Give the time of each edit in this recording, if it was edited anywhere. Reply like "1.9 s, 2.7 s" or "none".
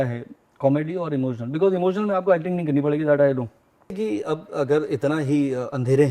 3.9 s